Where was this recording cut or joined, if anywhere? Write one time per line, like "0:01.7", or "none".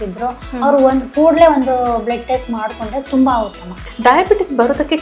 0:03.9